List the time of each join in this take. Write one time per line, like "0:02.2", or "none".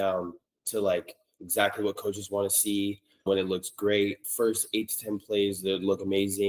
0:03.2
0:04.2